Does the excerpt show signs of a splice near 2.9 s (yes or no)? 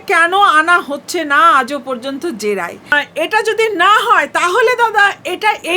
yes